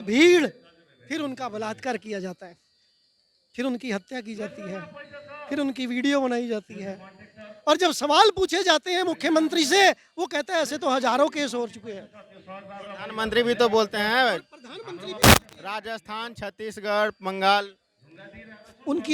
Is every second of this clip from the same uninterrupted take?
yes; 0 cuts

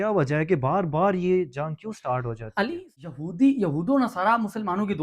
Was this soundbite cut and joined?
yes; 1 cut; at 3.1 s

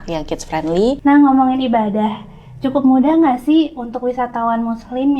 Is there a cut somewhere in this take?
yes; 1 cut; at 1.0 s

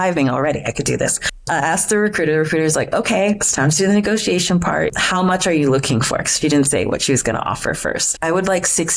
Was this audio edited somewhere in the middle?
yes; 3 cuts; at 1.3 s, 4.9 s, 8.1 s

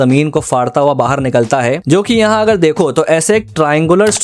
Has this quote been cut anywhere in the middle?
no; 0 cuts

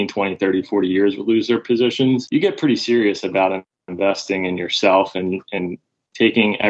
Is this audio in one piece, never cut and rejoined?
yes; 0 cuts

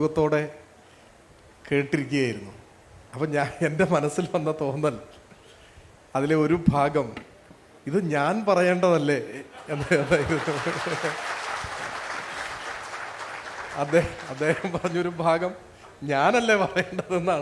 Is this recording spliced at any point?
no; 0 cuts

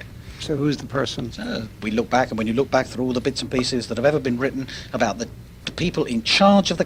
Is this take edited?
no; 0 cuts

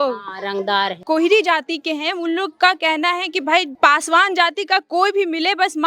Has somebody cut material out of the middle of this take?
yes; 1 cut; at 1.0 s

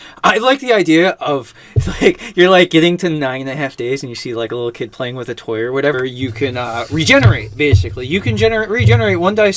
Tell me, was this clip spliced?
no; 0 cuts

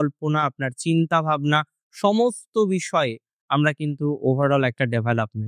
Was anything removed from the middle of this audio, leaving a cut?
no; 0 cuts

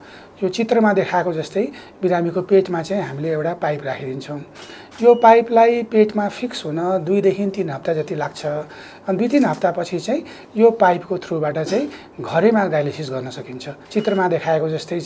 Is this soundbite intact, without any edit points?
no; 1 cut; at 13.8 s

